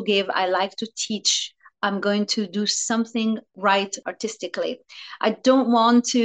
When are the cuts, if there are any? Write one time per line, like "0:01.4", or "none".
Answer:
0:03.5